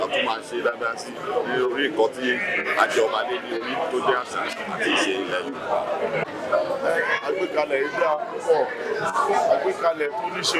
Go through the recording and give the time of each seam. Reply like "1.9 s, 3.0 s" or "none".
6.2 s

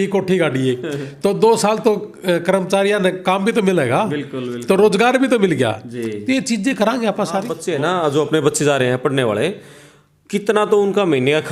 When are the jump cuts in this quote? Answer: 7.6 s

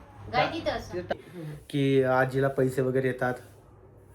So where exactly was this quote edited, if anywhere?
1.1 s

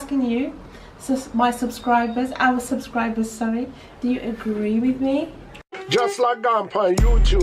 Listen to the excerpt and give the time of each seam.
5.7 s

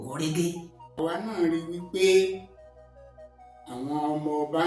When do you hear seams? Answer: 0.9 s

